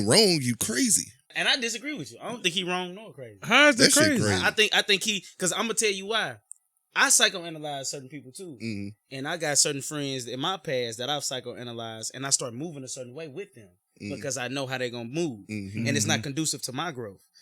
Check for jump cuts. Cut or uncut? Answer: cut